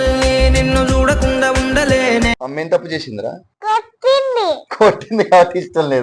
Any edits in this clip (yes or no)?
yes